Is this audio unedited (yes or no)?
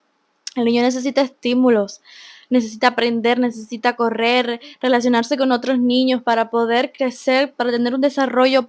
yes